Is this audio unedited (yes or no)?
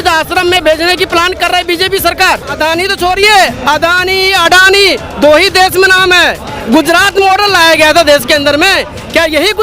no